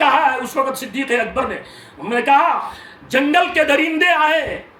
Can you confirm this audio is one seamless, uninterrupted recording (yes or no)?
yes